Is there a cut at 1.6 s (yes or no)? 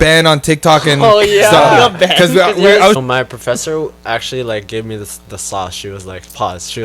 no